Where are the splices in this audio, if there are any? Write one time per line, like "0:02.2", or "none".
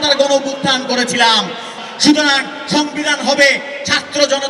0:01.8